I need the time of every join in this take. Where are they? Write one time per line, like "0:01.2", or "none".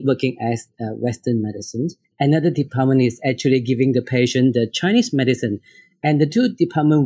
0:02.1